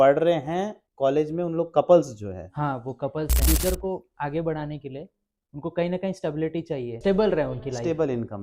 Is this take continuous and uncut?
no; 2 cuts; at 3.4 s, 7.0 s

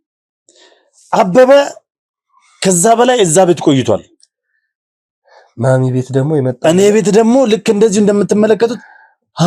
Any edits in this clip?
no; 0 cuts

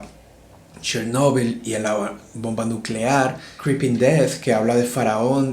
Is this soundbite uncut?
no; 1 cut; at 3.5 s

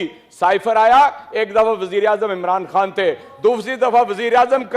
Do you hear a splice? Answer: no; 0 cuts

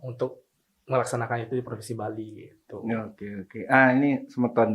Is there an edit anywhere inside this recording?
no; 0 cuts

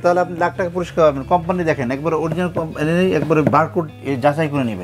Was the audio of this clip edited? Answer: no; 0 cuts

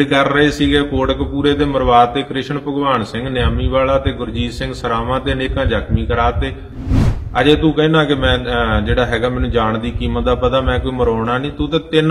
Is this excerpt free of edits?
yes; 0 cuts

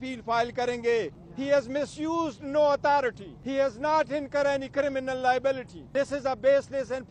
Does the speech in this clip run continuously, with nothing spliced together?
no; 3 cuts; at 1.2 s, 3.3 s, 5.7 s

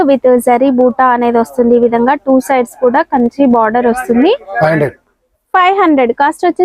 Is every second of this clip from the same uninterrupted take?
no; 1 cut; at 4.5 s

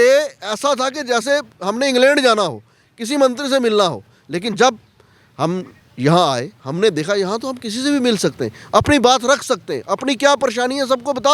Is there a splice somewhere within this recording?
no; 0 cuts

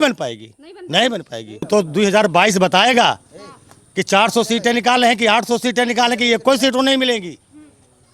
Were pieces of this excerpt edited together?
yes; 1 cut; at 1.7 s

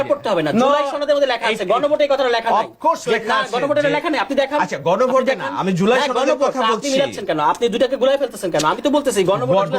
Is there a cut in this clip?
no; 0 cuts

